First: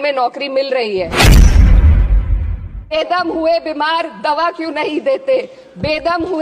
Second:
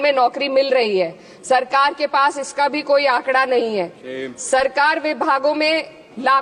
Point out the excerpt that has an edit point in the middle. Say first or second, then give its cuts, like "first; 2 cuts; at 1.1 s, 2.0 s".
first; 2 cuts; at 1.1 s, 2.9 s